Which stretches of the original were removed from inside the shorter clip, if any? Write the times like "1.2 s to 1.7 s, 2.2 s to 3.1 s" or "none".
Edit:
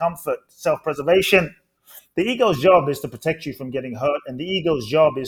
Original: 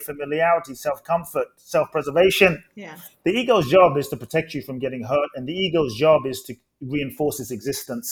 none